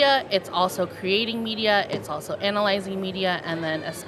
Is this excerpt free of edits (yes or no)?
yes